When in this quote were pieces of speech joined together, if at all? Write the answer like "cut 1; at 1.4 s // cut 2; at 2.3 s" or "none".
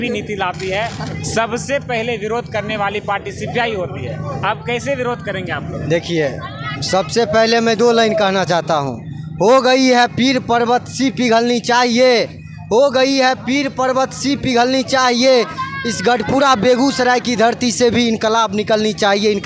none